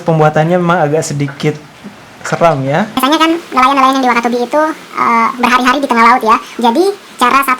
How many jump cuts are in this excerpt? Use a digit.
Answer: 2